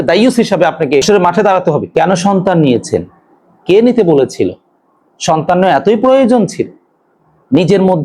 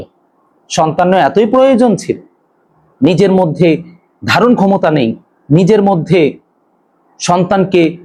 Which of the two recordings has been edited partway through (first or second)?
first